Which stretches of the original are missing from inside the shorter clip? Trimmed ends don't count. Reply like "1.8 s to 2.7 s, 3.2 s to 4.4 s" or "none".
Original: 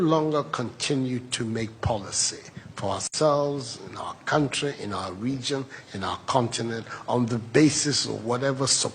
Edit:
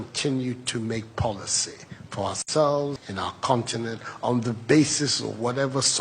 3.7 s to 5.9 s